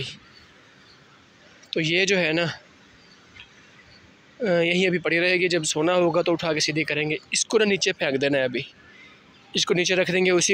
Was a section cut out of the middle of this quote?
no; 0 cuts

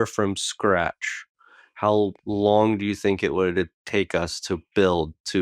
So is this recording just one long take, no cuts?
yes; 0 cuts

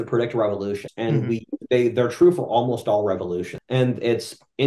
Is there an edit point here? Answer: yes; 2 cuts; at 0.9 s, 3.5 s

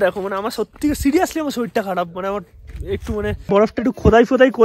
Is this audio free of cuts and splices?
no; 1 cut; at 3.5 s

